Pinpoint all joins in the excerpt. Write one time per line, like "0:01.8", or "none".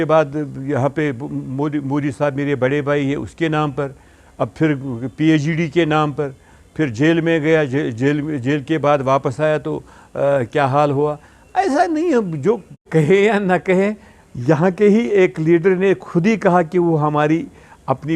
0:12.9